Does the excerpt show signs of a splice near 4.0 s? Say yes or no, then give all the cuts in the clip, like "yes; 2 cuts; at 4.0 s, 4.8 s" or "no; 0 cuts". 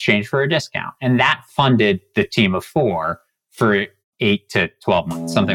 yes; 1 cut; at 4.0 s